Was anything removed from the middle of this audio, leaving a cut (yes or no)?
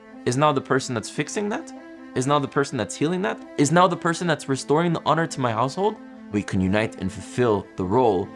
yes